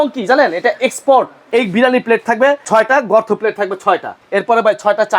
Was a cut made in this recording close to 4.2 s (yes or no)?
yes